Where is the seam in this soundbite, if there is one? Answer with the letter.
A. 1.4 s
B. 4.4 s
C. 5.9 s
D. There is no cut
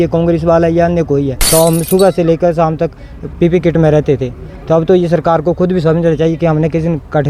A